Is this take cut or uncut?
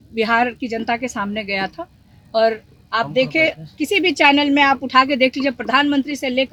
uncut